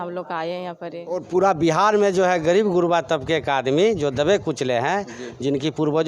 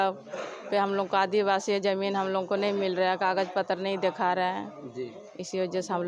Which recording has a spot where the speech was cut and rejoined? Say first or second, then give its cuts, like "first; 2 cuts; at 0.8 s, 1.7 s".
first; 1 cut; at 1.2 s